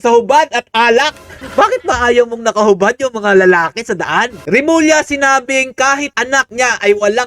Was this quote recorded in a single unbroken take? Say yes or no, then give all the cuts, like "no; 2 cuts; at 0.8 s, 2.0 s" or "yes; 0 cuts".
no; 2 cuts; at 1.4 s, 4.4 s